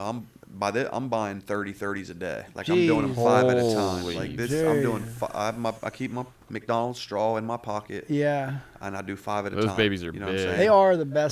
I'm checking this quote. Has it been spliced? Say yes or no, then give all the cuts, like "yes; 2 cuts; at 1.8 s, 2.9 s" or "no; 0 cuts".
no; 0 cuts